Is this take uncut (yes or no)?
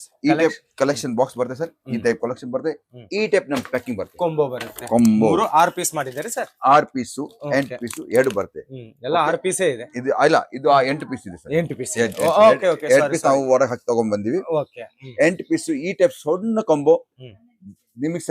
yes